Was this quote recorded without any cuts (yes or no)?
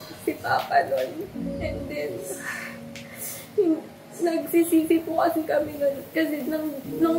yes